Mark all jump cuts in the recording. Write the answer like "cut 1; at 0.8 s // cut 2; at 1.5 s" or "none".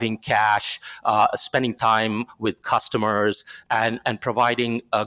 none